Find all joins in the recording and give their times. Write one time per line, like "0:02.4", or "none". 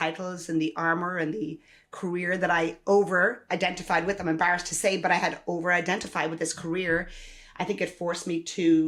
none